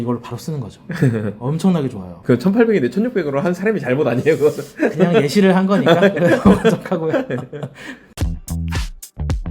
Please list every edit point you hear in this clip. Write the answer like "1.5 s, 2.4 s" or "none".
8.0 s